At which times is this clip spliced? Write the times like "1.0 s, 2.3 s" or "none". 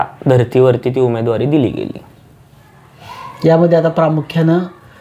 none

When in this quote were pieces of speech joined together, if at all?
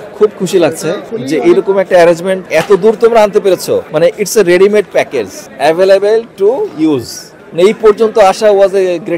1.1 s, 2.4 s, 3.9 s, 5.4 s

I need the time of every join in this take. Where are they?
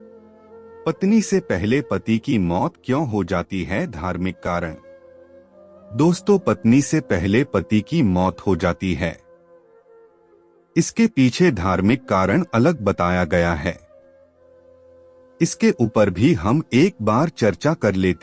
none

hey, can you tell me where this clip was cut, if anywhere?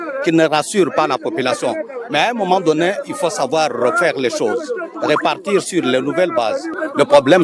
none

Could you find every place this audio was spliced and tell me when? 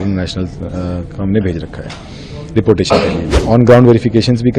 3.3 s

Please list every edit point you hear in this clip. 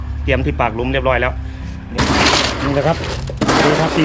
2.0 s

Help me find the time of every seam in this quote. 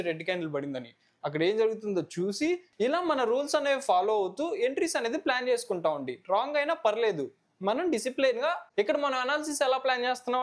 2.7 s, 8.6 s

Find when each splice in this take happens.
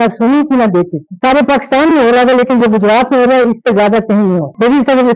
none

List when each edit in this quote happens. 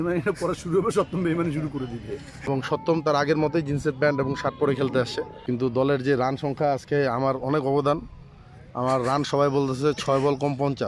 2.5 s, 5.3 s

